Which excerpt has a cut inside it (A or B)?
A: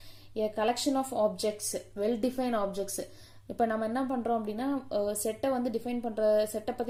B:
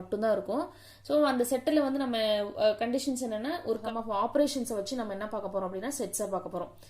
B